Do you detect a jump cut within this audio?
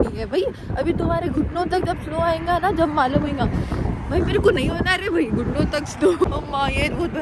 yes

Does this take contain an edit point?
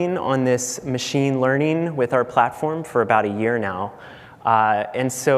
yes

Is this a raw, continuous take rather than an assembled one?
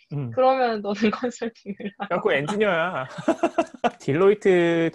no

